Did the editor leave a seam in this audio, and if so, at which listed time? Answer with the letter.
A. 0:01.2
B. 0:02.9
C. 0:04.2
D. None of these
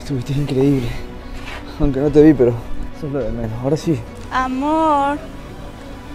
D